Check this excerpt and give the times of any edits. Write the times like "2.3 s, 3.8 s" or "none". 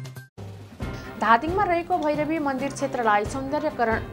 0.9 s